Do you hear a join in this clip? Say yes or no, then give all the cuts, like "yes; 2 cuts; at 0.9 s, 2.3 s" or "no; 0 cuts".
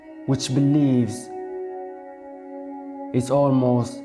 yes; 2 cuts; at 1.3 s, 2.9 s